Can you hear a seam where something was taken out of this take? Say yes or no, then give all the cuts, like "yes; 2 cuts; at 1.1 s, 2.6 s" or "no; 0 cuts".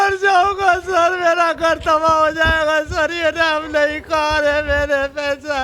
no; 0 cuts